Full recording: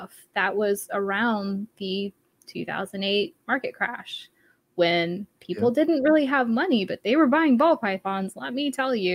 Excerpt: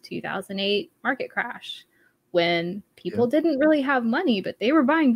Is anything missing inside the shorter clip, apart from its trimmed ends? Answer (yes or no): no